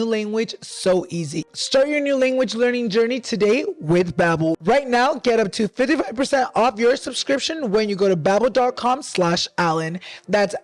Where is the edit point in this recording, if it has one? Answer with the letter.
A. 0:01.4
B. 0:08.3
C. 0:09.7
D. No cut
A